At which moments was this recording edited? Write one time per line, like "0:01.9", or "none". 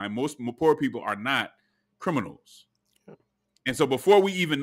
none